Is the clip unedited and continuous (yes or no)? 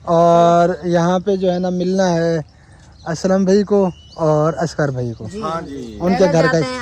yes